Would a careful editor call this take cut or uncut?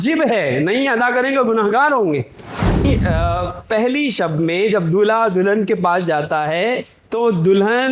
cut